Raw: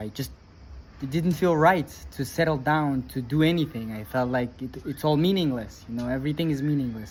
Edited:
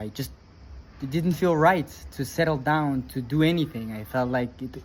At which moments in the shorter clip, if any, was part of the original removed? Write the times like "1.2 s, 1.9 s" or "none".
none